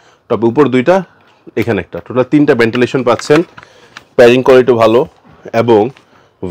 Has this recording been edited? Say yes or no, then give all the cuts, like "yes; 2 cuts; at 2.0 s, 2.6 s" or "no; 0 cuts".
no; 0 cuts